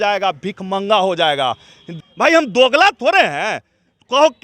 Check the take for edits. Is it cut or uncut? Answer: cut